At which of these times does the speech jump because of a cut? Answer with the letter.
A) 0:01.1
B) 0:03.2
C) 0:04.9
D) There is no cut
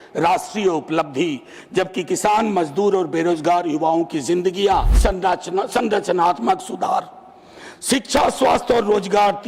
C